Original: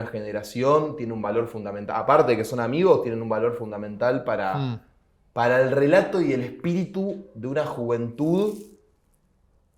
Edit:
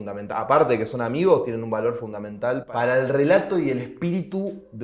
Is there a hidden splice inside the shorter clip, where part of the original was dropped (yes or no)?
yes